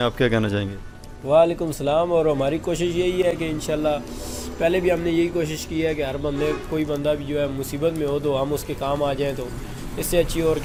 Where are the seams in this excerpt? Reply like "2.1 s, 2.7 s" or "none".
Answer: none